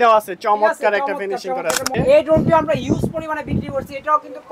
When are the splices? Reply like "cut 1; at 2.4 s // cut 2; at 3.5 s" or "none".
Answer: cut 1; at 1.9 s